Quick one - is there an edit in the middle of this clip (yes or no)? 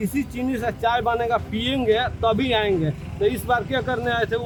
no